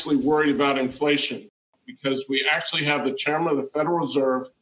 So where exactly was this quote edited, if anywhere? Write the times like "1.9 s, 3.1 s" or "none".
1.8 s